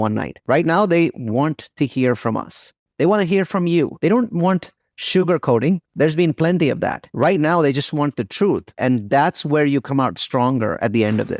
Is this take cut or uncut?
cut